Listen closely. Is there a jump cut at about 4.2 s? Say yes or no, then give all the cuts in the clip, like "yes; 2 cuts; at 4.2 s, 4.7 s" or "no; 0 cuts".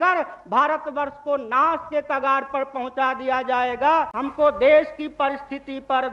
yes; 1 cut; at 4.2 s